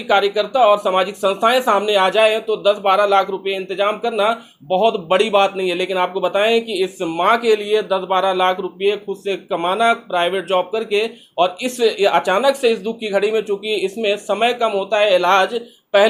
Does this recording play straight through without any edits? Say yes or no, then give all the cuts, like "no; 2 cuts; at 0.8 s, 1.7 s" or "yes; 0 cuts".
yes; 0 cuts